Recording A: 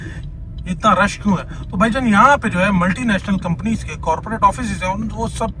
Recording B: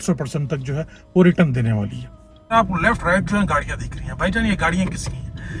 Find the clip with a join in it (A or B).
B